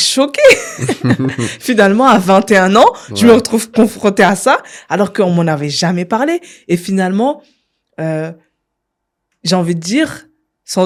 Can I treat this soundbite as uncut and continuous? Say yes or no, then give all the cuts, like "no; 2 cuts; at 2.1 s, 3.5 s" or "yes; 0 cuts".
yes; 0 cuts